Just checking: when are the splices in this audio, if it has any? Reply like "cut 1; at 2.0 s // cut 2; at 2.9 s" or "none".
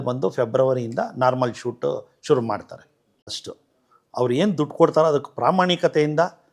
cut 1; at 3.4 s